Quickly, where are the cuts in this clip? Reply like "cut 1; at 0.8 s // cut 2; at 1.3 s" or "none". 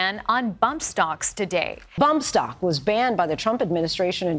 cut 1; at 1.9 s

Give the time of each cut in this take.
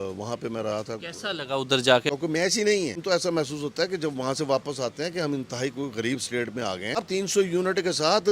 cut 1; at 2.1 s // cut 2; at 3.0 s // cut 3; at 7.0 s

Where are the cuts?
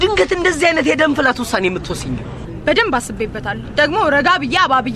none

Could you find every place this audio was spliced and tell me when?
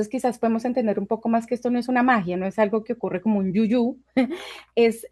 none

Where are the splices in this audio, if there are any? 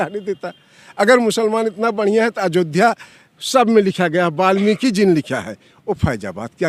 none

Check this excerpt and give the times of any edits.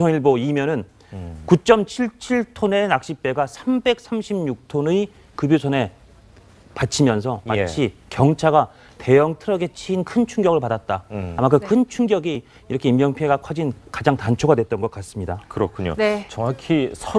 cut 1; at 14.5 s

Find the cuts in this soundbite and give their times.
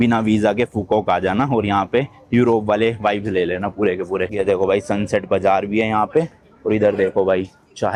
none

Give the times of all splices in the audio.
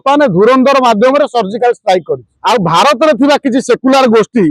cut 1; at 2.3 s

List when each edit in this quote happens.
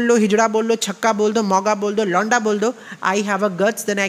none

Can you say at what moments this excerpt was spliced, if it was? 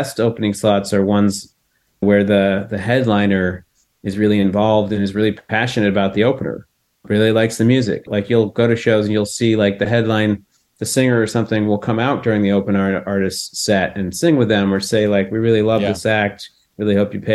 cut 1; at 2.0 s // cut 2; at 7.0 s // cut 3; at 8.1 s

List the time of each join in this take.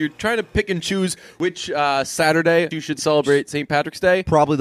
cut 1; at 1.4 s // cut 2; at 2.7 s

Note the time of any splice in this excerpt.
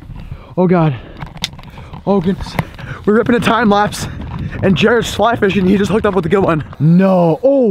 cut 1; at 6.7 s

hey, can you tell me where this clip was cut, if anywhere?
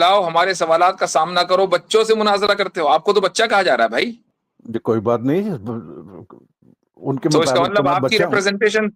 none

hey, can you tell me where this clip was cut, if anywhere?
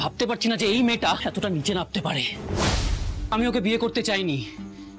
cut 1; at 1.2 s // cut 2; at 3.3 s

